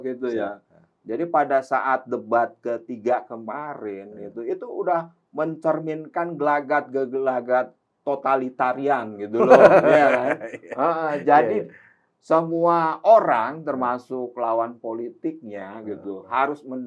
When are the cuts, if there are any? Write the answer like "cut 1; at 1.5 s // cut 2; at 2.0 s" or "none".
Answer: none